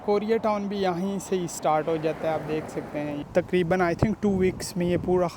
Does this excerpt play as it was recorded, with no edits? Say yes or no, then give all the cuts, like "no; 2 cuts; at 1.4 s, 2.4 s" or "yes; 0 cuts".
no; 1 cut; at 3.2 s